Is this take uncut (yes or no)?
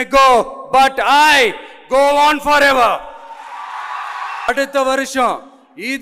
no